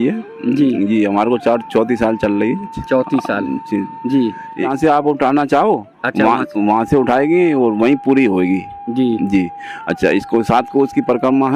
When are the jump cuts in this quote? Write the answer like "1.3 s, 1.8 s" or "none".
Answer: 4.7 s